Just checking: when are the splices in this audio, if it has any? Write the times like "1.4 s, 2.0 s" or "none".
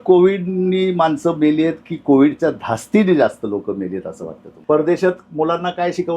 4.5 s